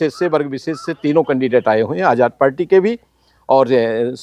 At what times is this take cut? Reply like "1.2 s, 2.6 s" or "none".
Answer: none